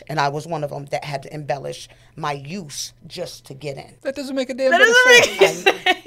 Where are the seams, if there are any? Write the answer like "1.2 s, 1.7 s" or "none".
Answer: 3.9 s, 4.8 s